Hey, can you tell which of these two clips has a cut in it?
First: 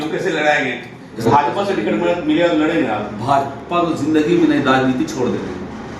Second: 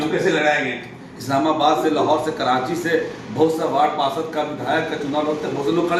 first; 1 cut; at 1.2 s

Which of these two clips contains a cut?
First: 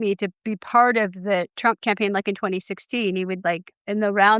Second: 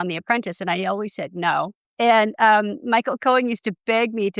second; 1 cut; at 2.0 s

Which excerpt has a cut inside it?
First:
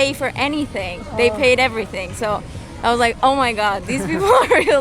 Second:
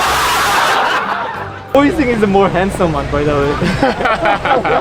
second; 1 cut; at 1.6 s

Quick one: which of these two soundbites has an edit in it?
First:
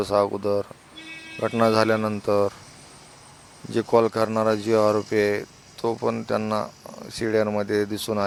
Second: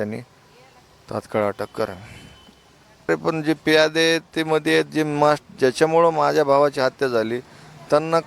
second; 1 cut; at 3.1 s

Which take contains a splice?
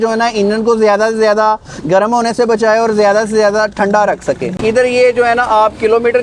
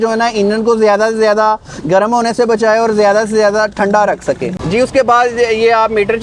first; 1 cut; at 4.6 s

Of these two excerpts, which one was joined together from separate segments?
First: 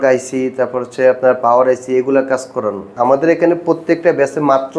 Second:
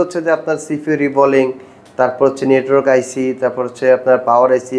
first; 1 cut; at 2.9 s

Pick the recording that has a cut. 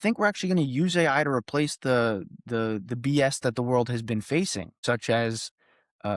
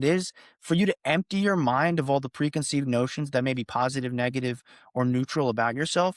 first; 1 cut; at 4.7 s

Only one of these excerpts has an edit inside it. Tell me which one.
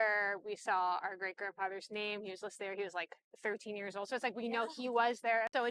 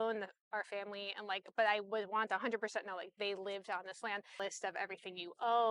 second; 1 cut; at 4.4 s

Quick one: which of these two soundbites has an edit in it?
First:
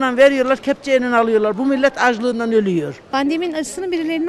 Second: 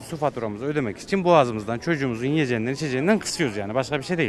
first; 1 cut; at 3.0 s

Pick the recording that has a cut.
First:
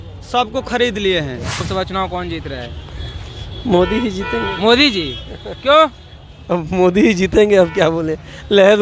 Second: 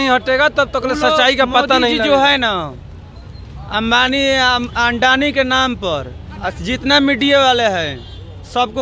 first; 1 cut; at 1.7 s

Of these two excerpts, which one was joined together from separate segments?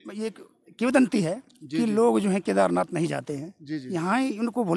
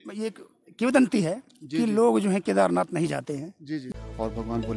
second; 1 cut; at 3.9 s

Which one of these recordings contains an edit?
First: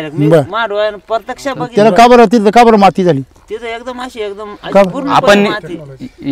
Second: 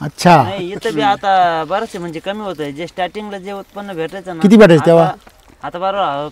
first; 1 cut; at 1.6 s

